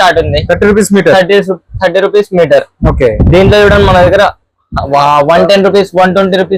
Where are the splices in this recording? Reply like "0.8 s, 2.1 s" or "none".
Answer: none